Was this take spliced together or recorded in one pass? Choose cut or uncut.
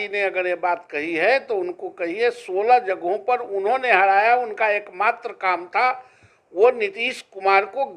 uncut